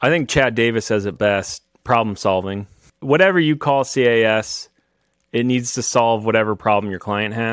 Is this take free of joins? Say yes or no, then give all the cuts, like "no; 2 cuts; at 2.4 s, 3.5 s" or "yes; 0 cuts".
no; 1 cut; at 2.9 s